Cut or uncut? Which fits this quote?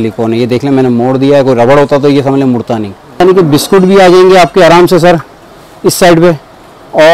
cut